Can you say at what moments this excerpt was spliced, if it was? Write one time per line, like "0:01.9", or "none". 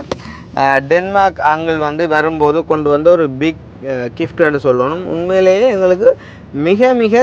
none

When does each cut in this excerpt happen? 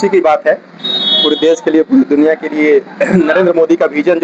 none

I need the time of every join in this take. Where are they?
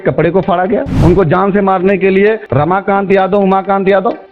0:00.9

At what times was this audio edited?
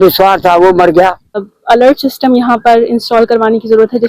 0:01.5

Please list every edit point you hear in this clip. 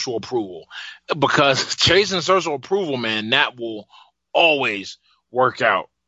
0:01.0

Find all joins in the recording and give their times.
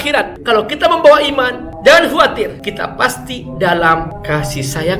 none

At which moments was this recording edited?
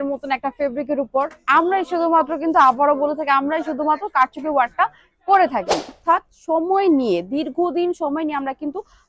0:06.0

